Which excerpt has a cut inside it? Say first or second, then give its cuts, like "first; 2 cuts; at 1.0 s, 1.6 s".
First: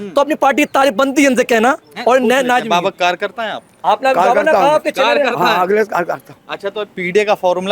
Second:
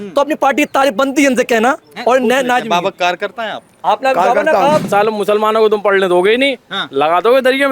second; 1 cut; at 4.9 s